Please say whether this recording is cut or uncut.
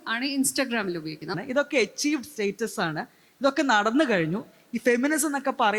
cut